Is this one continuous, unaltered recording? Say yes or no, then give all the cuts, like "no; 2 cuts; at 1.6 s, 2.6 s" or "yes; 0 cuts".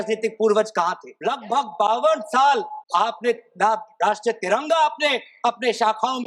no; 2 cuts; at 1.1 s, 2.8 s